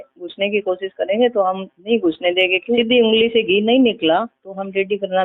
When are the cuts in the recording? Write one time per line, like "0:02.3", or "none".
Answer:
0:02.8